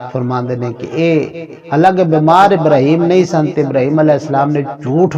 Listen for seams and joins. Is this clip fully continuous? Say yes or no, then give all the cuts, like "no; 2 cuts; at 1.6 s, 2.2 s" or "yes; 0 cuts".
yes; 0 cuts